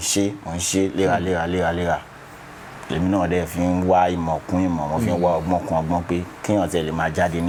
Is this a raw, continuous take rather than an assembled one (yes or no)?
yes